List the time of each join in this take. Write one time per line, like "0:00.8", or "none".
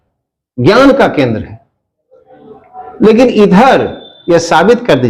0:04.1